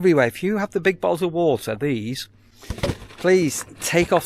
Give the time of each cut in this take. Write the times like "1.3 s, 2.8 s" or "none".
none